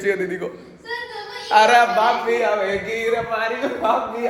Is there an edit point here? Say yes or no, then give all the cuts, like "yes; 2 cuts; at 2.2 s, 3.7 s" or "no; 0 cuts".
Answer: no; 0 cuts